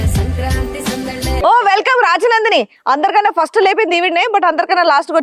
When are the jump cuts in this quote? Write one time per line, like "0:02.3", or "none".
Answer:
0:01.4